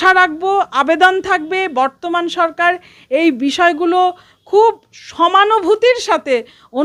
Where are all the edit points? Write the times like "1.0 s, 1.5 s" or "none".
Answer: none

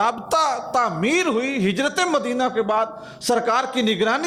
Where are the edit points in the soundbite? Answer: none

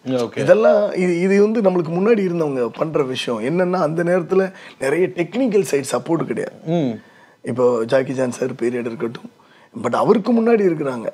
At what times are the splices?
none

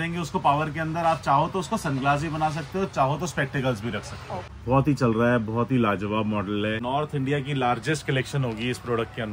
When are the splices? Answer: 4.4 s, 6.8 s

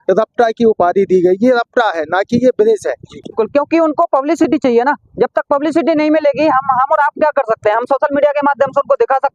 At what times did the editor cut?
3.3 s

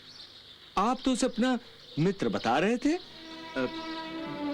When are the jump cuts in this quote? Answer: none

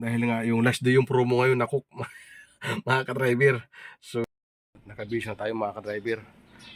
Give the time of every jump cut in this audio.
4.2 s

